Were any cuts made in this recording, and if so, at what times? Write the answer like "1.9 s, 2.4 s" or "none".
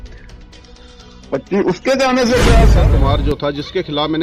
2.8 s